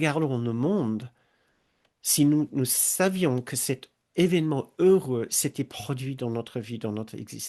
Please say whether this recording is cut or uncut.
cut